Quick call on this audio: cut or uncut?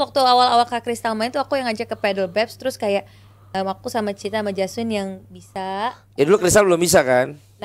uncut